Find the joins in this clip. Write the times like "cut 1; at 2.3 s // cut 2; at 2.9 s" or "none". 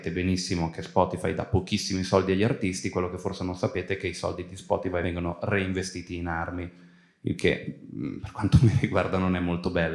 cut 1; at 5.0 s